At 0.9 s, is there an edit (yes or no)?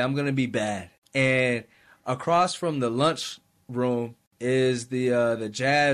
yes